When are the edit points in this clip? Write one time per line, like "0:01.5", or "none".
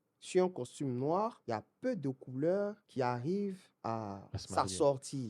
0:01.4
0:02.8
0:03.7